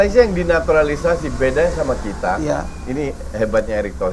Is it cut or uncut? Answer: uncut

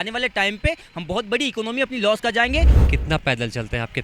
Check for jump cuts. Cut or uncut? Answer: cut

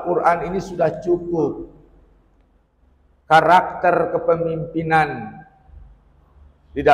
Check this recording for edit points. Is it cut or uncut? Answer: uncut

